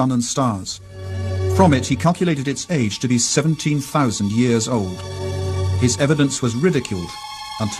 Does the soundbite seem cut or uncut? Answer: uncut